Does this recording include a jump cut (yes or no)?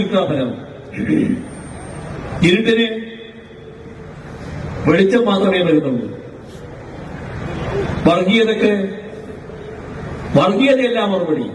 no